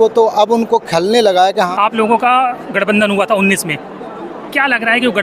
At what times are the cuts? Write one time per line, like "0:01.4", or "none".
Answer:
0:01.7